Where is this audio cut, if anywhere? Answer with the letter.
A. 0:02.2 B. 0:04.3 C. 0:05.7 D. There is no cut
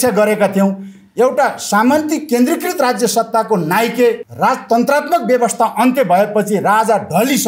B